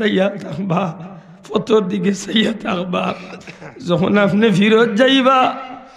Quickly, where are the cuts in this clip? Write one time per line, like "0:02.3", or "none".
none